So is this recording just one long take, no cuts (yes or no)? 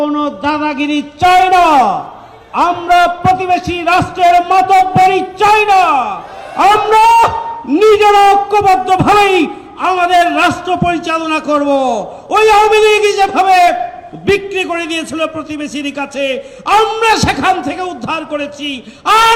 yes